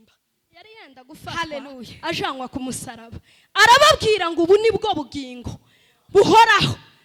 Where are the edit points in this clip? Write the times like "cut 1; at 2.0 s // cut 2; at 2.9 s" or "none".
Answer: cut 1; at 1.9 s